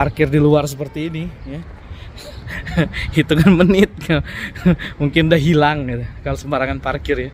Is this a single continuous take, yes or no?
yes